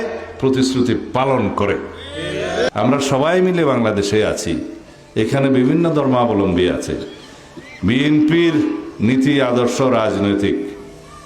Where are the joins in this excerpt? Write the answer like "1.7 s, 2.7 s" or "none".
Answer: 2.7 s